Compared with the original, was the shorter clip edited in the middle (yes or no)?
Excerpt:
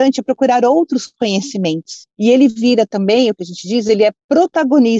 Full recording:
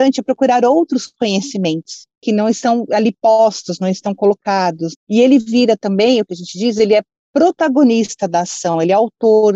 yes